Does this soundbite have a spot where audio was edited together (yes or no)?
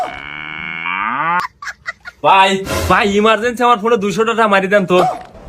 yes